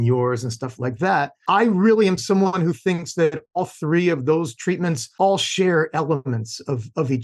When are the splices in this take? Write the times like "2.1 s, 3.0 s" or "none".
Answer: 1.4 s, 5.0 s